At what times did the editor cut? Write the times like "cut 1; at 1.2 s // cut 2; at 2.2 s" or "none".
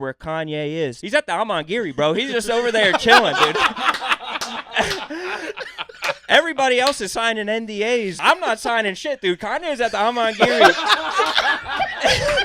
cut 1; at 1.0 s // cut 2; at 8.1 s